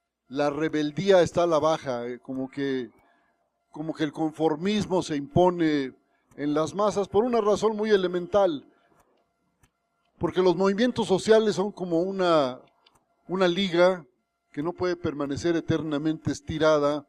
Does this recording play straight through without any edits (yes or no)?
yes